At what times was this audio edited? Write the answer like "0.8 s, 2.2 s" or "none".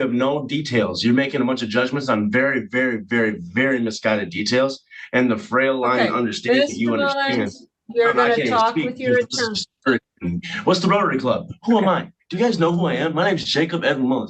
none